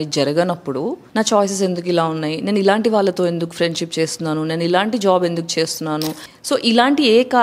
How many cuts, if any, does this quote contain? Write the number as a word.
two